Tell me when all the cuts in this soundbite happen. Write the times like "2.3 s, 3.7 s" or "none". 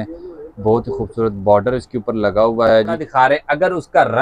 3.0 s